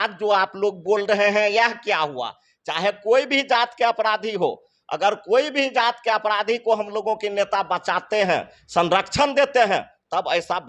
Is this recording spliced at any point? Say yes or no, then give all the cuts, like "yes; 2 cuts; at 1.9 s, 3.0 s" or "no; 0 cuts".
no; 0 cuts